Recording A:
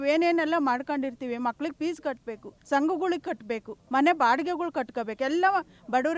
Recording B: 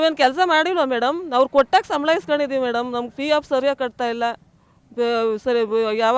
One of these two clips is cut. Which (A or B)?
A